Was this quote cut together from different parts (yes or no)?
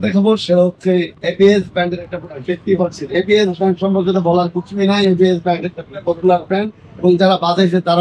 yes